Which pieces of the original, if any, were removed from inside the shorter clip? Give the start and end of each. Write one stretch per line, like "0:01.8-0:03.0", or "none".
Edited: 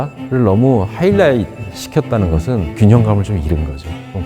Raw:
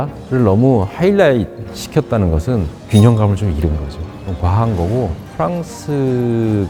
0:02.7-0:02.8